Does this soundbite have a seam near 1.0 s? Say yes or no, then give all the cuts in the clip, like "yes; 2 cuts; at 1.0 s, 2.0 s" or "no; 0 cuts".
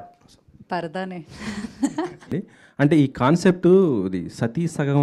no; 1 cut; at 2.3 s